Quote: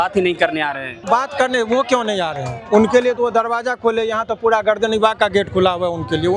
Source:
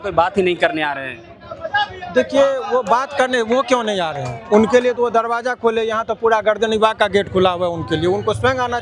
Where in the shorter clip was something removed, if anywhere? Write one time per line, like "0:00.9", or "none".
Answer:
0:01.1